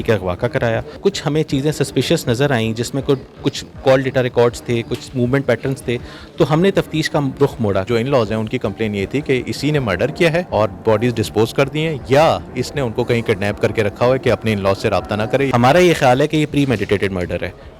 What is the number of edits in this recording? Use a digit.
4